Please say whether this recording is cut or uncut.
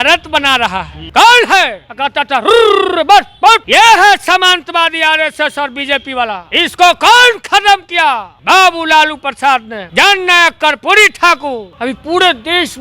cut